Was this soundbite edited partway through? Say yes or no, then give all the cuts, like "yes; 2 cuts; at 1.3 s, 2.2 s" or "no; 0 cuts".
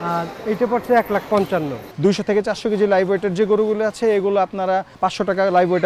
yes; 2 cuts; at 1.8 s, 4.9 s